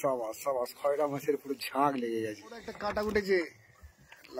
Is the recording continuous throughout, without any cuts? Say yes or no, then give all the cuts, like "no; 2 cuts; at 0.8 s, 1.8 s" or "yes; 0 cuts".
no; 1 cut; at 2.9 s